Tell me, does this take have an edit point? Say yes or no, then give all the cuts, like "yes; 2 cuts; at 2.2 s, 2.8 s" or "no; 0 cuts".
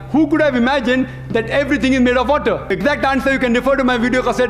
yes; 1 cut; at 2.7 s